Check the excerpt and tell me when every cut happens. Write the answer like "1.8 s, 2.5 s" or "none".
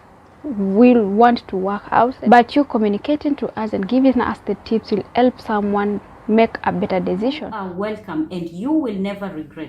2.2 s, 7.5 s